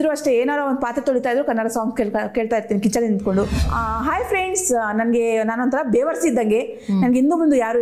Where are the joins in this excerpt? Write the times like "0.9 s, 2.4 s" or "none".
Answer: 3.6 s